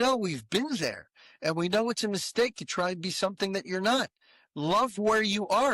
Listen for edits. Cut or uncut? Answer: uncut